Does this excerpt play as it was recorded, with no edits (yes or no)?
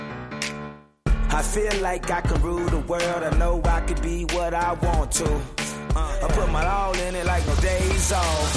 yes